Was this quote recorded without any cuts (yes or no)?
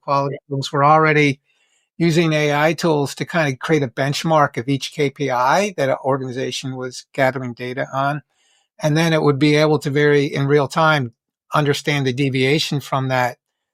yes